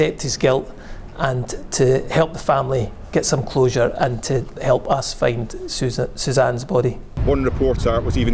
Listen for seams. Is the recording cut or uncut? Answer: cut